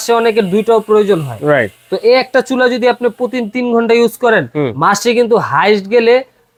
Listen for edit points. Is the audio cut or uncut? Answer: uncut